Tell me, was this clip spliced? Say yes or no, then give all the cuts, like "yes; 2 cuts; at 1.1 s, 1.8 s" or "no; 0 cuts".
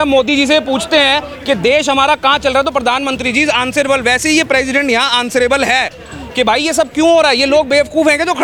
no; 0 cuts